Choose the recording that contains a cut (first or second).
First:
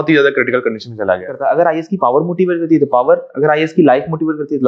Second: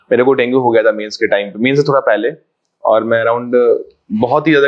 first